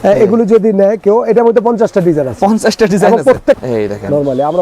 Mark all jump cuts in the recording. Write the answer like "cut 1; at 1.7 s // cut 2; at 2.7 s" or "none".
cut 1; at 3.6 s